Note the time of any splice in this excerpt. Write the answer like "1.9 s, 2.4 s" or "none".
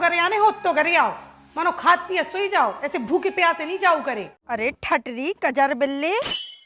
4.4 s

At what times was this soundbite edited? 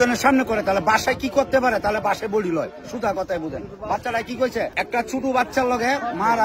4.7 s

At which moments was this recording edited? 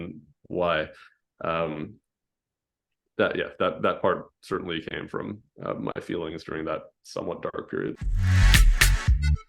8.1 s

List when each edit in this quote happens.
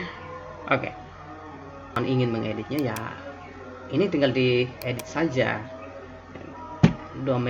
2.0 s

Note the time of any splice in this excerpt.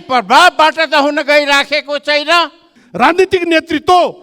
2.8 s

